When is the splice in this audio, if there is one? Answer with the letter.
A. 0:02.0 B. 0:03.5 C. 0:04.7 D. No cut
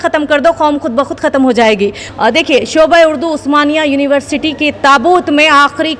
A